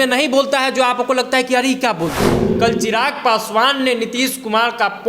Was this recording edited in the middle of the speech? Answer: yes; 1 cut; at 2.5 s

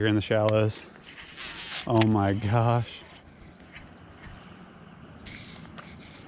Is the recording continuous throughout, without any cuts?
yes; 0 cuts

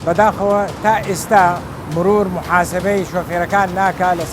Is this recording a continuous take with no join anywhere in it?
no; 1 cut; at 1.7 s

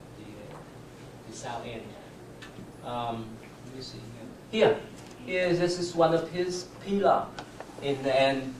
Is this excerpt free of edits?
yes; 0 cuts

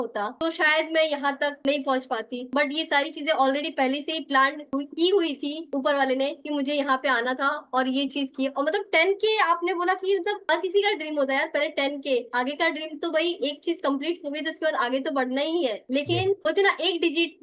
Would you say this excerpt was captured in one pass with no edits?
yes; 0 cuts

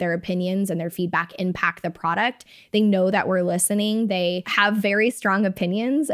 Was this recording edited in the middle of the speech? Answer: yes; 1 cut; at 4.5 s

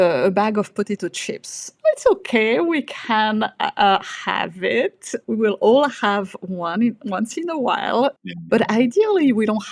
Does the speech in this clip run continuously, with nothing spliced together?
yes; 0 cuts

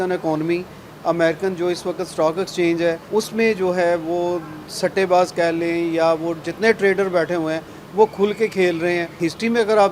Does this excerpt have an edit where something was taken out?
yes; 2 cuts; at 3.0 s, 9.1 s

